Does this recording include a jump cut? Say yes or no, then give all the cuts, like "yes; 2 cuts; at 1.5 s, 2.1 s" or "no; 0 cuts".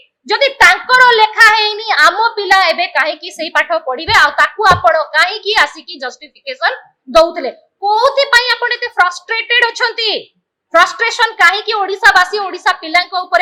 no; 0 cuts